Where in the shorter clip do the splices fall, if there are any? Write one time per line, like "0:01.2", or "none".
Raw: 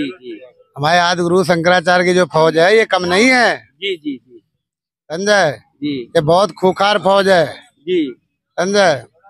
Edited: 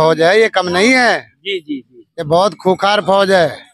0:02.1